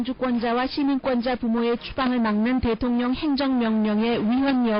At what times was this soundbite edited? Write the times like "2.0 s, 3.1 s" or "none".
1.9 s